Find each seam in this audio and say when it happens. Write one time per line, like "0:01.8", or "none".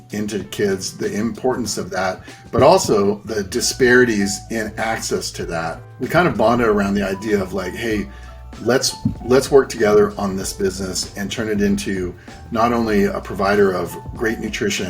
0:03.2
0:05.8